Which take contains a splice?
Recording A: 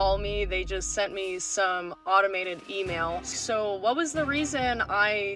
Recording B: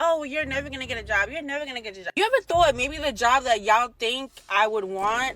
A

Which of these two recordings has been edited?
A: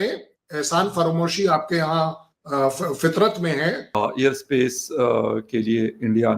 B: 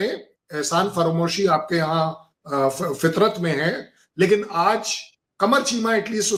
A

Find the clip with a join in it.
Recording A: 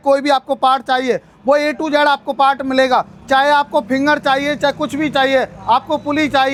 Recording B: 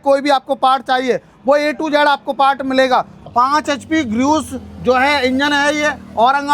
B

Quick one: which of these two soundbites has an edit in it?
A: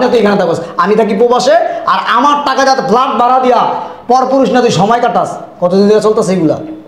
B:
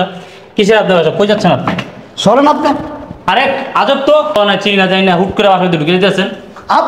B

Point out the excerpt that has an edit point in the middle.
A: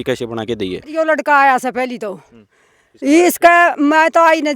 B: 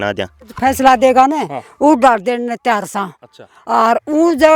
A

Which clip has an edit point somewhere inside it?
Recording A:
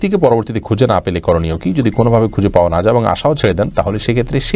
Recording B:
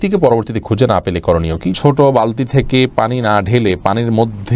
B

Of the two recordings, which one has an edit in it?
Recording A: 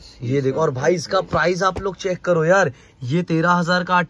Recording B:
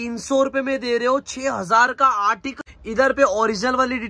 B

